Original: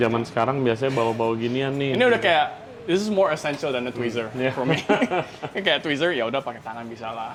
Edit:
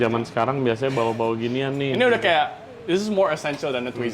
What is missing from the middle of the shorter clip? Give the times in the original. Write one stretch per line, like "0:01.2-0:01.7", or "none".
none